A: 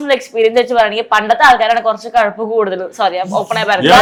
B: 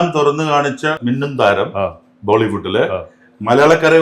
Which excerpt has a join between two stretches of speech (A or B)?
B